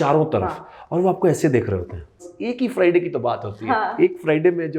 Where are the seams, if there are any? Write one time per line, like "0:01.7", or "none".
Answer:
0:02.3